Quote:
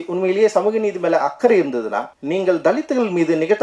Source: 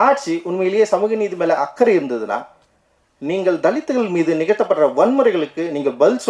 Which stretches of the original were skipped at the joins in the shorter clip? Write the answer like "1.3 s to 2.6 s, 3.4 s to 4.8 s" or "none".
2.5 s to 3.1 s

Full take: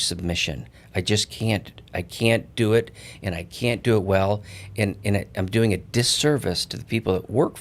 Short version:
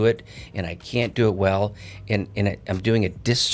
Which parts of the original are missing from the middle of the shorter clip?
none

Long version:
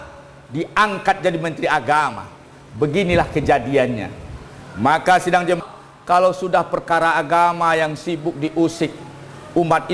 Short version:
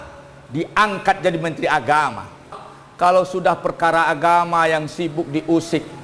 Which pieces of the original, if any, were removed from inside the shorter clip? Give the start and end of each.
2.6 s to 5.7 s

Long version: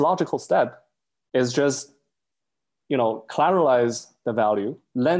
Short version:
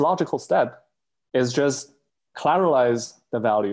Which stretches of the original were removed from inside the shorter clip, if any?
2.3 s to 3.2 s

